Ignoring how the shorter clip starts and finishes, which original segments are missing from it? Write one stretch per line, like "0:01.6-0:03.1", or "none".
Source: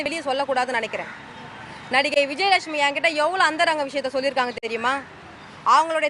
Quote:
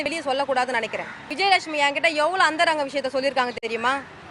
0:01.3-0:02.3